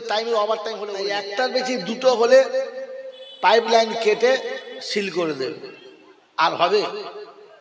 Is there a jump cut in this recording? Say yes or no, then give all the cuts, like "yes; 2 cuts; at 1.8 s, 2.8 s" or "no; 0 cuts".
yes; 1 cut; at 1.2 s